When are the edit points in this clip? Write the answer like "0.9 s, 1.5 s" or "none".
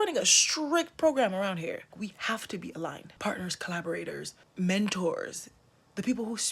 1.9 s, 3.1 s, 4.4 s